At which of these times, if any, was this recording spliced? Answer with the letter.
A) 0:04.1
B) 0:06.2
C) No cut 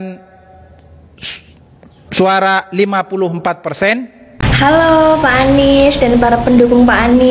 A